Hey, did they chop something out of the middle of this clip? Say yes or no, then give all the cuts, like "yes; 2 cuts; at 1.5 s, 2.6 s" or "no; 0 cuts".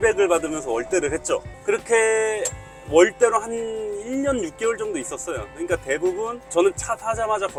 no; 0 cuts